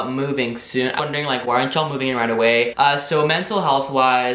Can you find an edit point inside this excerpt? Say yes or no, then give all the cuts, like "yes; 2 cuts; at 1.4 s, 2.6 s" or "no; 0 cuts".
yes; 2 cuts; at 0.9 s, 2.7 s